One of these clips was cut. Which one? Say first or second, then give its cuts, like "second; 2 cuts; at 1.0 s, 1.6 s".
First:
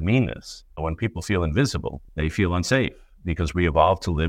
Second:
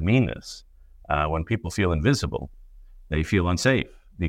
first; 2 cuts; at 0.8 s, 2.0 s